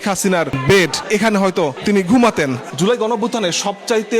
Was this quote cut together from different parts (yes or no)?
yes